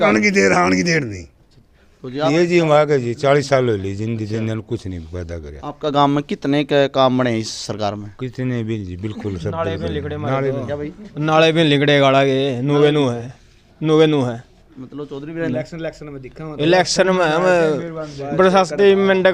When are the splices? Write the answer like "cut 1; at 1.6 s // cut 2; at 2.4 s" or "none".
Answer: cut 1; at 2.3 s // cut 2; at 15.5 s